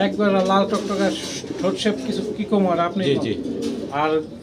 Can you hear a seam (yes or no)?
no